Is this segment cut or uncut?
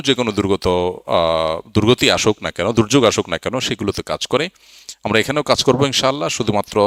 uncut